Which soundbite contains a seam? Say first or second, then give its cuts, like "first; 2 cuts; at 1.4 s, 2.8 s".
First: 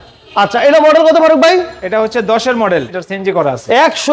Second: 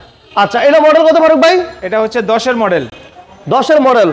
first; 1 cut; at 3.0 s